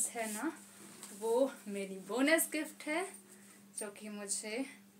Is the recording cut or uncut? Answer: uncut